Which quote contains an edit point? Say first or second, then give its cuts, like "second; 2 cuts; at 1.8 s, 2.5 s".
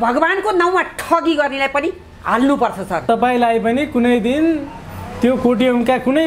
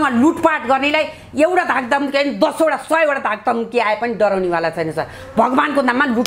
first; 1 cut; at 3.1 s